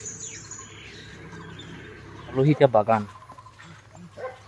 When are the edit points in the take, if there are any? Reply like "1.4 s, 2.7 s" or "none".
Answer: 2.4 s